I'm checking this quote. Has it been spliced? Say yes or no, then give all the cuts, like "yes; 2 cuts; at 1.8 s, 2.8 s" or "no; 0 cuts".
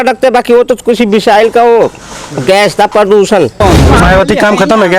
yes; 1 cut; at 3.6 s